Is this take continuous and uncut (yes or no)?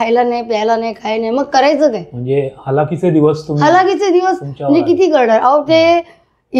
yes